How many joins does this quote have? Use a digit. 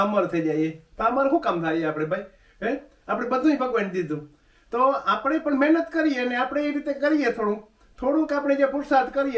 0